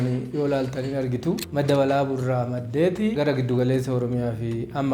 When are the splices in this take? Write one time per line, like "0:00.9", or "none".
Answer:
0:01.5